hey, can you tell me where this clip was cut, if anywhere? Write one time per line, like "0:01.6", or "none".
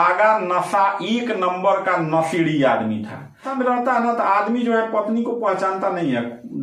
0:03.5